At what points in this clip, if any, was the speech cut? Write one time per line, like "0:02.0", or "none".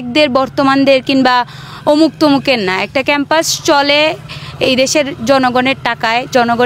none